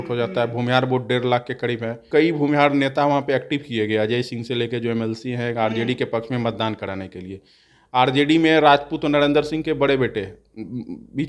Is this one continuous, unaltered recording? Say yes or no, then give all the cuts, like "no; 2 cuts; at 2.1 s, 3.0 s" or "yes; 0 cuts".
no; 1 cut; at 2.0 s